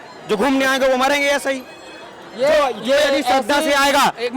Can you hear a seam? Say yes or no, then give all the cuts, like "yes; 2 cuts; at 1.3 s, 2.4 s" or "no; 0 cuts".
no; 0 cuts